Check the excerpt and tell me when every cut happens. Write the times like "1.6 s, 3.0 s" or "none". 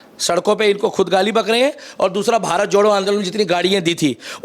none